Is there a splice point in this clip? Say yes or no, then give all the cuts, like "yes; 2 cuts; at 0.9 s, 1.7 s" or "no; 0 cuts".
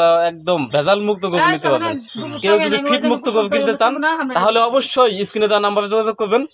no; 0 cuts